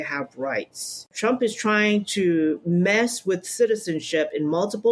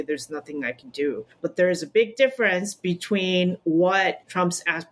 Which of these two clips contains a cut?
first; 1 cut; at 1.1 s

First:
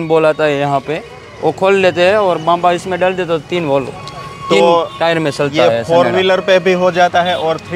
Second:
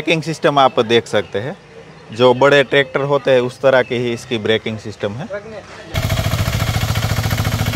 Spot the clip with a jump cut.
second; 1 cut; at 5.9 s

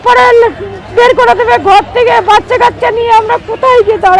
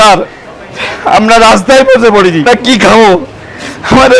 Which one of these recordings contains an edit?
second; 1 cut; at 2.4 s

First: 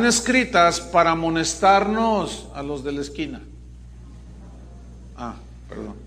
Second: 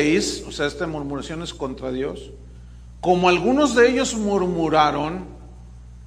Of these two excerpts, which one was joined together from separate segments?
second; 1 cut; at 4.1 s

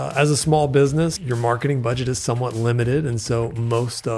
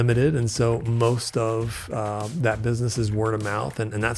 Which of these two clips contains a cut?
first; 1 cut; at 1.2 s

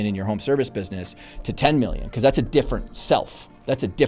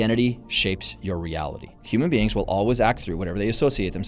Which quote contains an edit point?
second; 1 cut; at 1.8 s

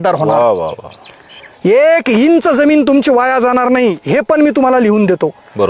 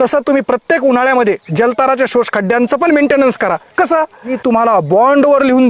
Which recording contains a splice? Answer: second; 1 cut; at 4.4 s

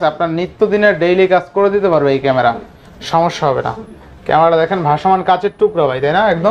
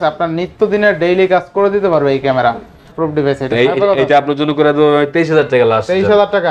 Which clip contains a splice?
second; 1 cut; at 2.9 s

